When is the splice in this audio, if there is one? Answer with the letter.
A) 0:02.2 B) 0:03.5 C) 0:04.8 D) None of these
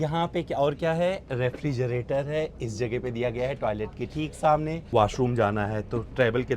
C